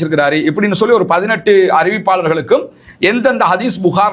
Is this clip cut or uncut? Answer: uncut